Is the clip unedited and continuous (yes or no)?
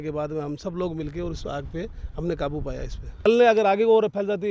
no